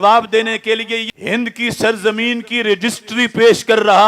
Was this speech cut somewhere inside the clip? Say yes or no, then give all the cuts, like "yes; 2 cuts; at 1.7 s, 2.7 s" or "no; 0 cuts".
yes; 1 cut; at 1.1 s